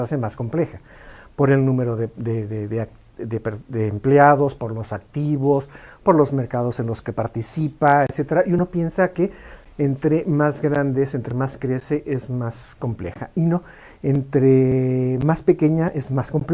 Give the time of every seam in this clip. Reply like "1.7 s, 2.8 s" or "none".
none